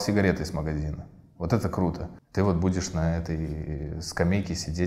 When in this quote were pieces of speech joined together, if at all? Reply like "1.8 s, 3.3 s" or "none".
2.1 s